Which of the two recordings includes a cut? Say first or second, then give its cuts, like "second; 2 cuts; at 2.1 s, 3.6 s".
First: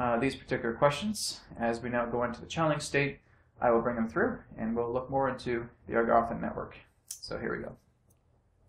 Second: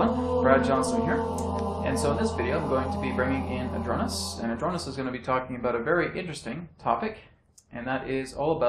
first; 1 cut; at 4.7 s